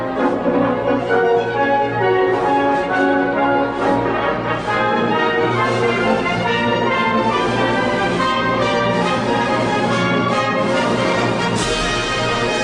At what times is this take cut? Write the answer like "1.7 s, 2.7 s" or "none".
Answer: none